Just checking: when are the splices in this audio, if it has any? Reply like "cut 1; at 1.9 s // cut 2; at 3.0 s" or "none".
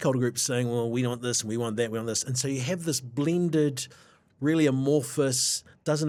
none

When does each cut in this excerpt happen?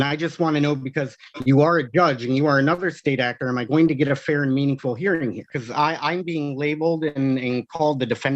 cut 1; at 5.6 s

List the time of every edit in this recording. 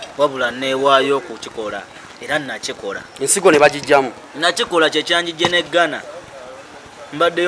none

